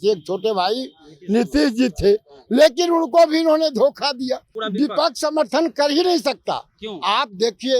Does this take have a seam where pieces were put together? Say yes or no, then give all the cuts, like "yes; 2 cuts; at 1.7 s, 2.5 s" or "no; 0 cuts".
yes; 1 cut; at 4.5 s